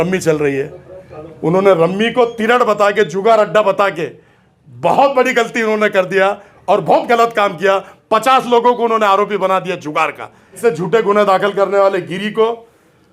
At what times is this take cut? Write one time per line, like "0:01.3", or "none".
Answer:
0:10.6